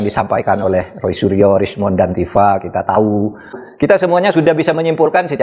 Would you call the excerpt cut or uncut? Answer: cut